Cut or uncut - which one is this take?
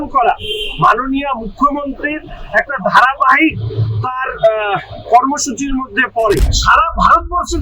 cut